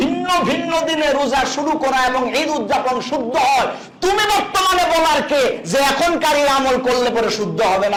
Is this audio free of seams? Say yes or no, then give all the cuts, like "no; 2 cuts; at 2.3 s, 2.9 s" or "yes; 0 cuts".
yes; 0 cuts